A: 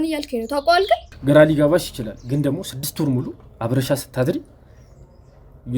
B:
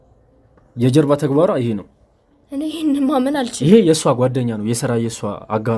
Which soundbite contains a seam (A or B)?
A